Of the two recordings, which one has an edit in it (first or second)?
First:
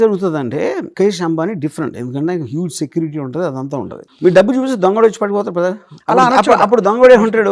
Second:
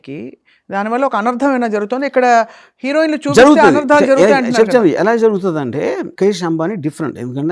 first